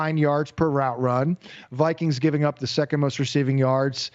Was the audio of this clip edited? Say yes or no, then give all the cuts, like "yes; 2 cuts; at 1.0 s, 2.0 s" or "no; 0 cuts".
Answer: no; 0 cuts